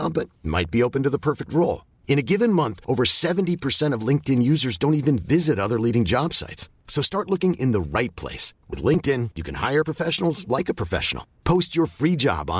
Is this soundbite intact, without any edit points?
yes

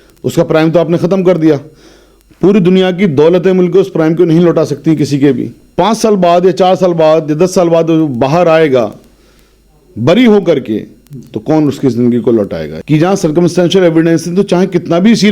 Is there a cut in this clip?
yes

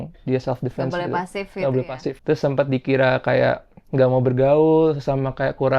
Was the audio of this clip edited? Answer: yes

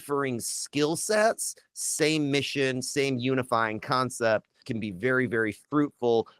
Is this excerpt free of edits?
no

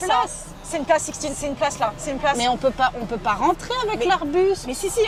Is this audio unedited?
yes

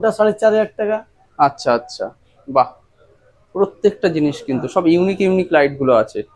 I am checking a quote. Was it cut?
no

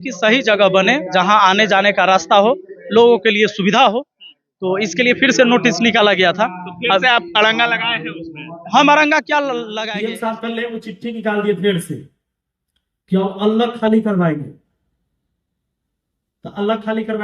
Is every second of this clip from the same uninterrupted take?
no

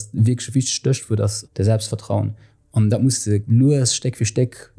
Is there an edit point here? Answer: yes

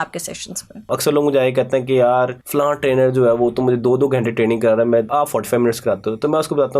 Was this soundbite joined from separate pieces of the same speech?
yes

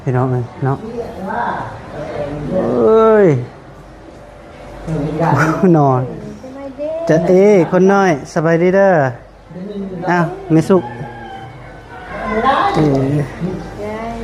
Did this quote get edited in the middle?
no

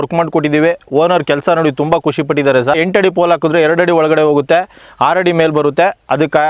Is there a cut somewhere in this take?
yes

